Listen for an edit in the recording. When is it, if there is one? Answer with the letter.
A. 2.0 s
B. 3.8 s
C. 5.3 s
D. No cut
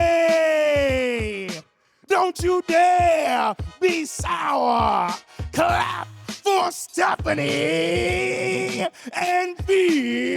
D